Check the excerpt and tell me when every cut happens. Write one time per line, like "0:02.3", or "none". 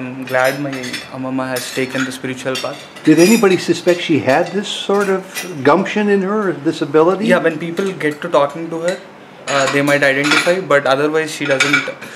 none

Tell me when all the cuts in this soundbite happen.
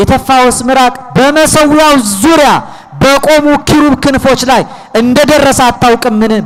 none

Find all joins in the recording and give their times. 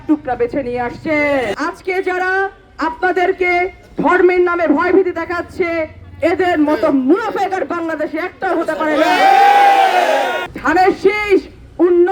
0:01.5
0:10.5

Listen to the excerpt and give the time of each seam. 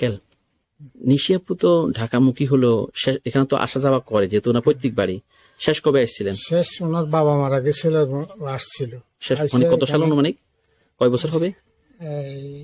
none

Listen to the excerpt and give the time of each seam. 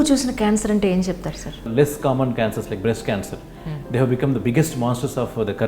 0:01.6

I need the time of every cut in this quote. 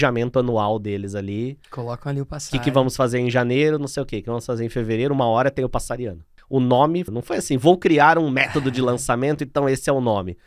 0:01.7
0:06.3
0:07.1

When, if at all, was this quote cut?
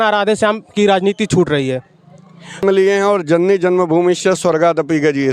0:02.6

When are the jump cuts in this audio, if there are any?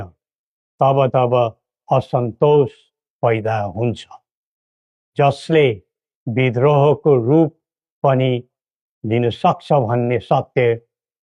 none

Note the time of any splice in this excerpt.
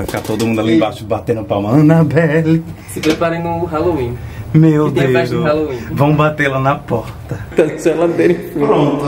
0:07.5

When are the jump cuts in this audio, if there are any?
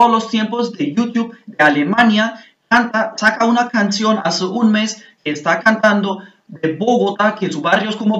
none

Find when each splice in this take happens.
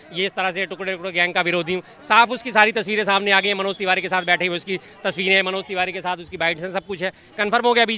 none

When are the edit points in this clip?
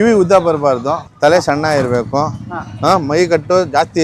0:01.1

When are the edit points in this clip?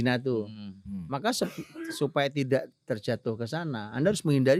none

